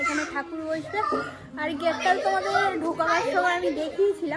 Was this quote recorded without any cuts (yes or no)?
yes